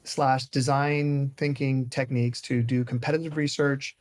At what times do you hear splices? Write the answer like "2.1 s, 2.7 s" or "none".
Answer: none